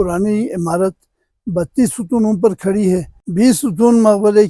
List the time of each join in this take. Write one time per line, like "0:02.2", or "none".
0:03.2